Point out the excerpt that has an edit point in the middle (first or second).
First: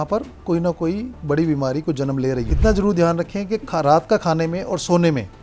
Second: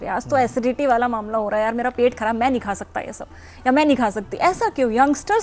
first